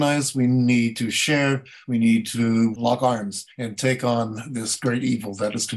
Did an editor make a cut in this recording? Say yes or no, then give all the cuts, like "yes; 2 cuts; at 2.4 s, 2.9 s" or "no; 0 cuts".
no; 0 cuts